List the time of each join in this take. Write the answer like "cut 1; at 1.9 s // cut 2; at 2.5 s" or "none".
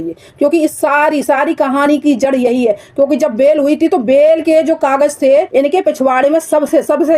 cut 1; at 5.5 s